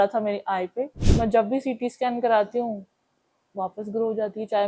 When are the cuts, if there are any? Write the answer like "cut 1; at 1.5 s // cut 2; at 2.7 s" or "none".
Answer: cut 1; at 1.0 s

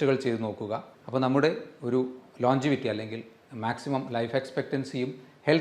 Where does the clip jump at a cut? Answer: cut 1; at 0.9 s

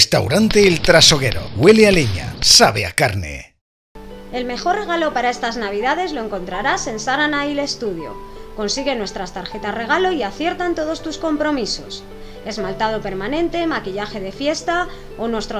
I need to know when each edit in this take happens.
cut 1; at 4.1 s

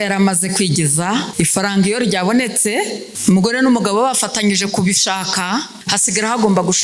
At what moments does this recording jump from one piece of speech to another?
cut 1; at 1.3 s // cut 2; at 3.1 s // cut 3; at 5.8 s

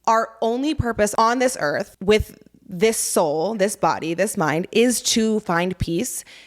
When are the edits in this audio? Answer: cut 1; at 1.1 s // cut 2; at 1.9 s

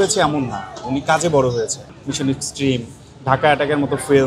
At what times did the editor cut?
cut 1; at 2.0 s

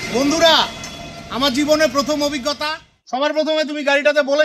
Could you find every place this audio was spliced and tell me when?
cut 1; at 2.9 s

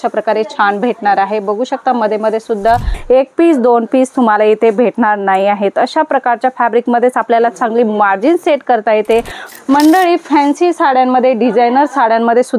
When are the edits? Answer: cut 1; at 2.9 s // cut 2; at 9.4 s

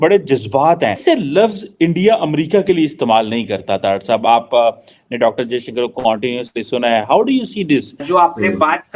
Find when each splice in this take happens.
cut 1; at 1.0 s // cut 2; at 8.0 s

